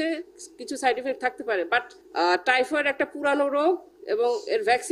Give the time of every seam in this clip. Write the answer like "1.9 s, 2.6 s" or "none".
2.0 s